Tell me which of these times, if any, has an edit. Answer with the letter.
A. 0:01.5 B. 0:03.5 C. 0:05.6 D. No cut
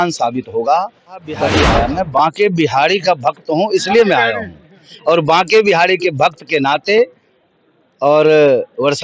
A